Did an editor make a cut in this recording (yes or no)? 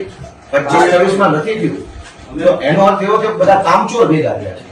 no